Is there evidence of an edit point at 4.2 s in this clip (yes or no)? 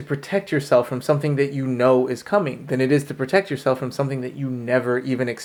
no